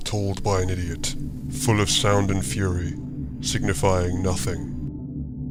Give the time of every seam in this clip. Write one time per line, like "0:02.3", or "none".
none